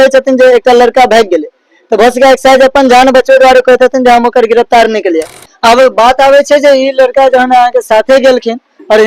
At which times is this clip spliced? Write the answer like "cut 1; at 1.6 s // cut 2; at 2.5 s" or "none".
cut 1; at 5.4 s